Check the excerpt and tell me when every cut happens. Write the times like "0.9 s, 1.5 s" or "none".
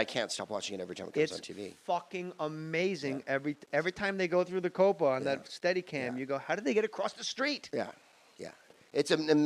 6.1 s

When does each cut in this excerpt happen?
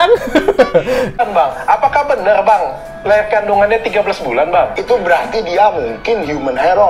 1.2 s, 4.8 s

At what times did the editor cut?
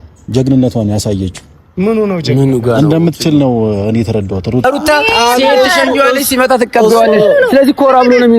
4.6 s

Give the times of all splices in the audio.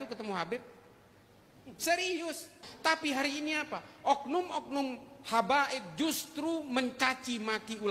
2.7 s

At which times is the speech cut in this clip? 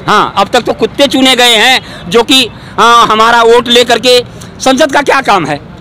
none

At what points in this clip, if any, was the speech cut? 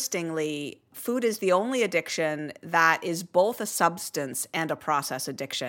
0.9 s

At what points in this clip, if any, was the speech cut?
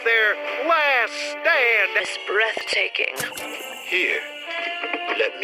2.0 s

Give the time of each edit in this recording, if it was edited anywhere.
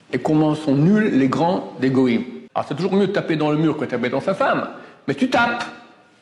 2.4 s

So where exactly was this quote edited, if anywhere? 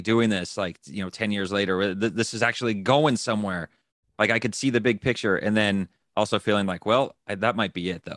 none

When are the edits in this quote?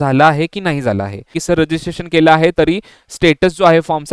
1.3 s

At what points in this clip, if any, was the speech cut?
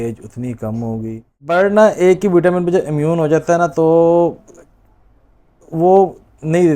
1.5 s

